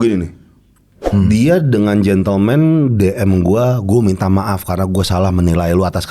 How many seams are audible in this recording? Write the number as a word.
one